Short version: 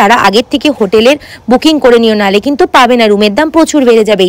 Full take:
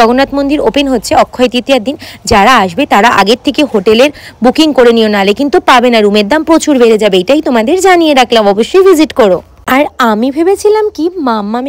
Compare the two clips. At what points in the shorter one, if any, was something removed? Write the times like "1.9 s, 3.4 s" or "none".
none